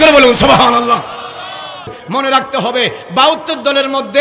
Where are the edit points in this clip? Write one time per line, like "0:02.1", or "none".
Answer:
0:01.9